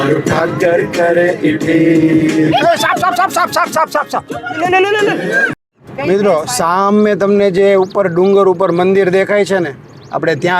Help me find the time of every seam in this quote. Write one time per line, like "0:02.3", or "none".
0:05.8

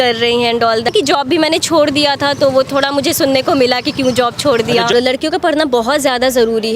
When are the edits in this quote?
0:00.9
0:04.9

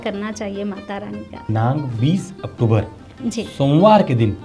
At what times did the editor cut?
0:01.5

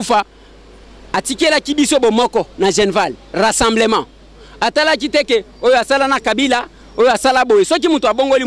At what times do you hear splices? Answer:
none

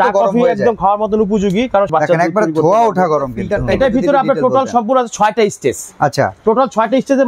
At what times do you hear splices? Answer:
0:01.9
0:03.5

